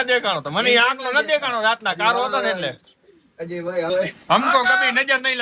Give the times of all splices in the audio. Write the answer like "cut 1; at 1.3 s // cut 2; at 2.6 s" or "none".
cut 1; at 3.9 s

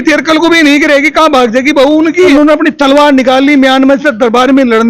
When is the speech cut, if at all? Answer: cut 1; at 2.3 s

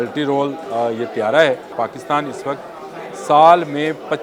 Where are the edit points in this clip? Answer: cut 1; at 1.7 s

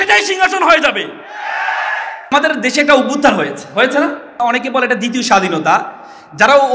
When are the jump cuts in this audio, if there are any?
cut 1; at 2.1 s

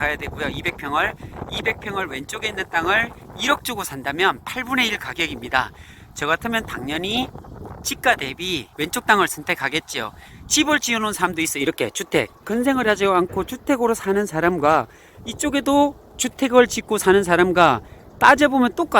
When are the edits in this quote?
cut 1; at 10.3 s

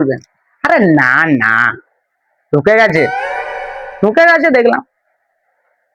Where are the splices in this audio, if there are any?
none

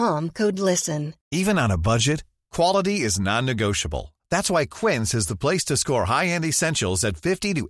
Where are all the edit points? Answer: none

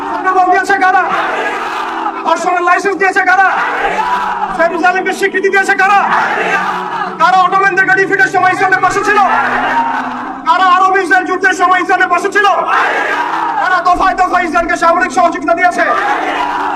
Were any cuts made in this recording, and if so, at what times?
none

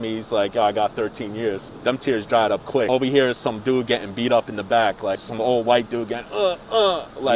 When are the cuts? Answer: cut 1; at 1.7 s // cut 2; at 2.9 s // cut 3; at 5.3 s

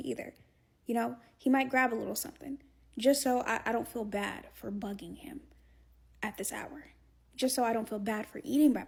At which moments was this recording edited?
none

